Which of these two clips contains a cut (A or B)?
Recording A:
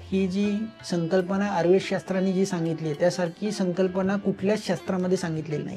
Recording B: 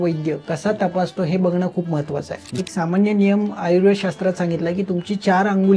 B